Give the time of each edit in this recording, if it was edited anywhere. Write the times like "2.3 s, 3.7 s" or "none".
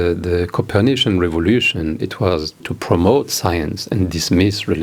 2.7 s